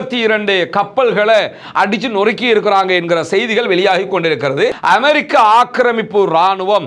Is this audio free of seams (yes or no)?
no